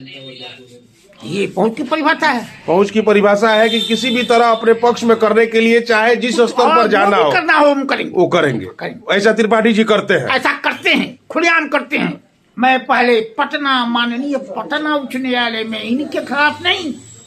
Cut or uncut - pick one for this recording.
cut